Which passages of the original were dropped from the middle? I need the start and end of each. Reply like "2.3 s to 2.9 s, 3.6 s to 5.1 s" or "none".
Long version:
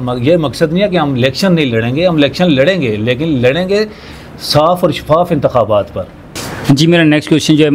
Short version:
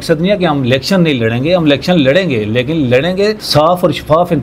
3.9 s to 4.4 s